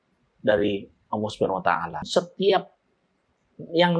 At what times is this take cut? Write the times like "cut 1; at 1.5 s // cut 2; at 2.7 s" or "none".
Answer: cut 1; at 2.0 s